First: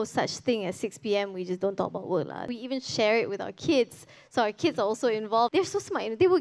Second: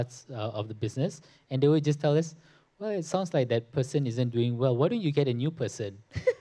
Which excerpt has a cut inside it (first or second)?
first